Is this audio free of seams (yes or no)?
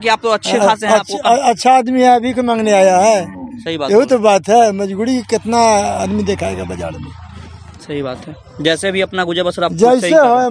yes